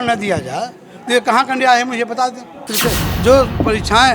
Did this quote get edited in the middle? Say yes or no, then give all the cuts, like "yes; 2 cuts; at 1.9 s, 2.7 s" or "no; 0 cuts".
yes; 1 cut; at 2.7 s